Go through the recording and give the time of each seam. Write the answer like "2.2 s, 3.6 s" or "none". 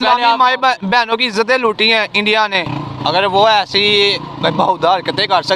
2.7 s